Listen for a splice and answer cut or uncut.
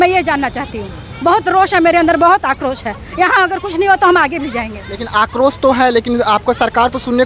uncut